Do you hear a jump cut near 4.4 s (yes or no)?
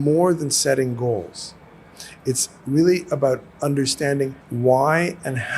yes